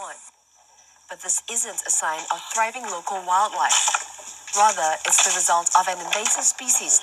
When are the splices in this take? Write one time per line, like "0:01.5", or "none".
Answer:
none